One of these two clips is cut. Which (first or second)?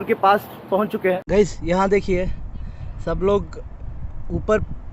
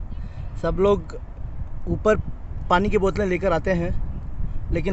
first